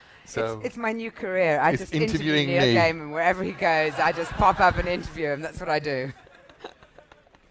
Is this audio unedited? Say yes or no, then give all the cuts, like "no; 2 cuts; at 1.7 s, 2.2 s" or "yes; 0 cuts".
yes; 0 cuts